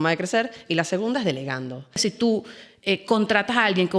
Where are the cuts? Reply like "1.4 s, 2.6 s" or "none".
2.0 s